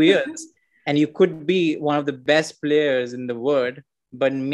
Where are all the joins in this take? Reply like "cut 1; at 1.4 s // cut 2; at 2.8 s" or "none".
cut 1; at 2.2 s